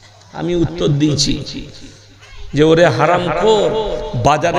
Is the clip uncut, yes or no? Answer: yes